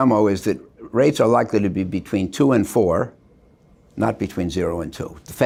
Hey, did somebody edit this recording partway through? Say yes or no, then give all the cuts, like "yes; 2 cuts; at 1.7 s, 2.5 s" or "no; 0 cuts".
no; 0 cuts